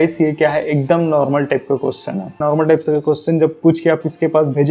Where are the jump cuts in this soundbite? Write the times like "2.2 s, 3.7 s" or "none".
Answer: 2.4 s